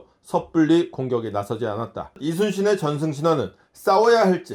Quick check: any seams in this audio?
yes; 1 cut; at 2.1 s

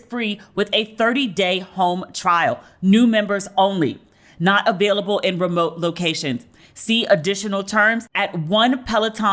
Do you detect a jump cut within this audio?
no; 0 cuts

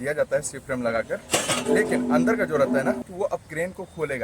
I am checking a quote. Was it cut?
yes; 1 cut; at 3.1 s

